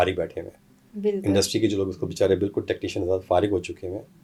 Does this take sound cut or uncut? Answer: uncut